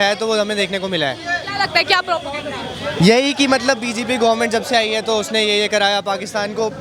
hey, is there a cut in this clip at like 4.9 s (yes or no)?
no